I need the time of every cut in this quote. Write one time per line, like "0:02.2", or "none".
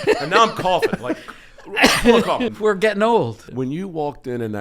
0:02.5
0:03.5